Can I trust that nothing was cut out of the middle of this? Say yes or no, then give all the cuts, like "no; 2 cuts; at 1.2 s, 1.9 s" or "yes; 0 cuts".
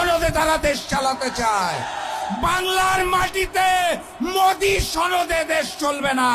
yes; 0 cuts